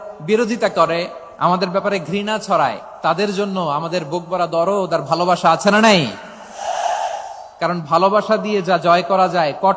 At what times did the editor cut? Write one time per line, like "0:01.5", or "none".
0:01.2